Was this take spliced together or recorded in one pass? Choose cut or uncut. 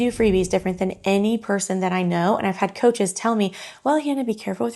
uncut